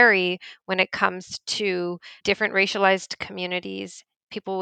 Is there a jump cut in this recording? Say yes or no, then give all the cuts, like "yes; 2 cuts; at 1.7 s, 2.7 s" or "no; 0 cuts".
yes; 1 cut; at 2.1 s